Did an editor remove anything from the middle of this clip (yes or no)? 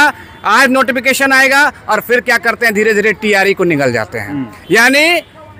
no